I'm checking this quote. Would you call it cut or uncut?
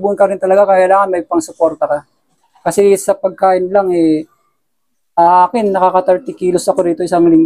uncut